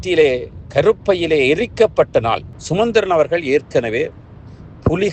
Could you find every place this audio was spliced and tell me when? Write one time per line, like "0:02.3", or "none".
0:02.5